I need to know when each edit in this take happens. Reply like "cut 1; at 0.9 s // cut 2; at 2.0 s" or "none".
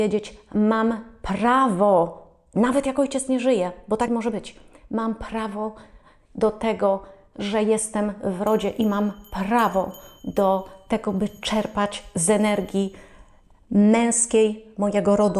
none